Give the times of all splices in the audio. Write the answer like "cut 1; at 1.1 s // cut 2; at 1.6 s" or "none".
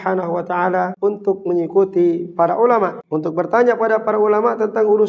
cut 1; at 0.9 s // cut 2; at 3.0 s